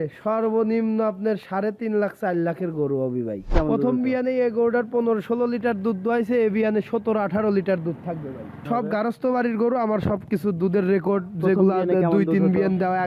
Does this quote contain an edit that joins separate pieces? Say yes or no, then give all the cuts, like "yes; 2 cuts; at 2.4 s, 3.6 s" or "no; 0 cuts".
yes; 2 cuts; at 3.5 s, 8.6 s